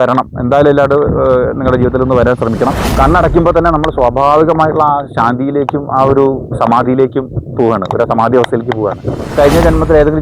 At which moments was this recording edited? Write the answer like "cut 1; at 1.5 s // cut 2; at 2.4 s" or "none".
cut 1; at 2.8 s // cut 2; at 9.3 s

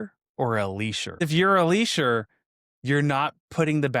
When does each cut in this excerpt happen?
cut 1; at 1.2 s

